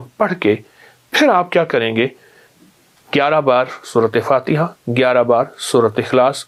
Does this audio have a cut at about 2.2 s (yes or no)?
no